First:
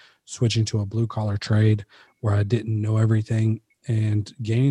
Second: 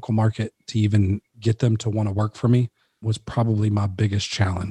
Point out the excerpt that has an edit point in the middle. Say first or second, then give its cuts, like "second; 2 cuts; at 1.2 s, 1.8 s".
second; 2 cuts; at 1.3 s, 3.1 s